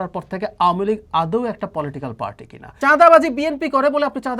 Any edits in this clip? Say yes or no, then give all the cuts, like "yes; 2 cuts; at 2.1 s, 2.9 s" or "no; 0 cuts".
yes; 1 cut; at 2.7 s